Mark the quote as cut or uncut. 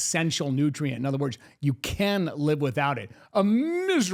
uncut